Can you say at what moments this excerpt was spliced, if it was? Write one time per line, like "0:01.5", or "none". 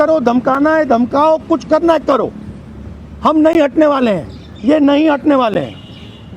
none